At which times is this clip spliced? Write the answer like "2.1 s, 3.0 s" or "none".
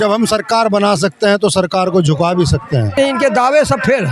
3.0 s